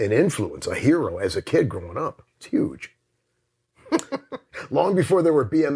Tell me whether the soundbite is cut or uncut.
cut